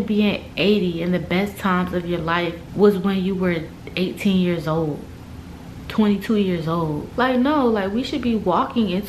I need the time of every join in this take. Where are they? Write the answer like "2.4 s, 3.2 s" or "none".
2.6 s, 7.1 s